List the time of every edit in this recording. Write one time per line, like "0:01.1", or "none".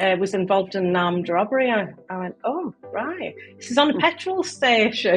none